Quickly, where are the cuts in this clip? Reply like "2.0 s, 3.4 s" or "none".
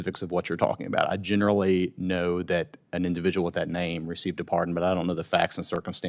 none